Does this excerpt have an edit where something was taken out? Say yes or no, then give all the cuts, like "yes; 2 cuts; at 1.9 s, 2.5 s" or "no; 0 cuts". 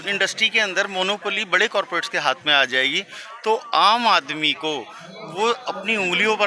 no; 0 cuts